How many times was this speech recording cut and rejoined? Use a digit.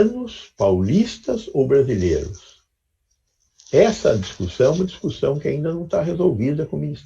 0